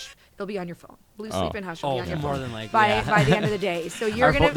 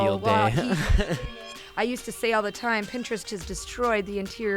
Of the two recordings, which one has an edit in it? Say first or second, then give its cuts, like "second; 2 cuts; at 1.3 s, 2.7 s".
second; 1 cut; at 1.1 s